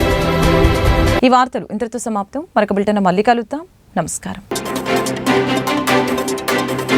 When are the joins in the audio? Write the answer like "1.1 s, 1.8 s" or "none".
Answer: none